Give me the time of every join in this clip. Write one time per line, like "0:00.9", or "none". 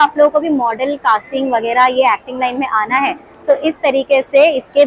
none